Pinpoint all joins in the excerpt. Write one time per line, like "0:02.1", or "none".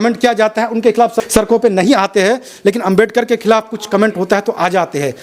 none